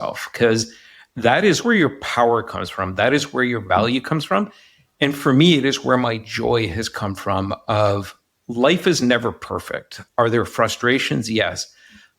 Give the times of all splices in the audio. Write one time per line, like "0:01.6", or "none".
0:01.6
0:09.9